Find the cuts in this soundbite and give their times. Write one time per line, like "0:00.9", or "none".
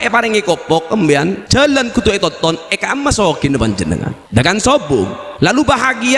0:01.4
0:04.2
0:05.2